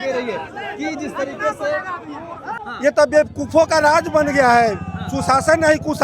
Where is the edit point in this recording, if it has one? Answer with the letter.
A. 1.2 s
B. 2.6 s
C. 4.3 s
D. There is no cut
B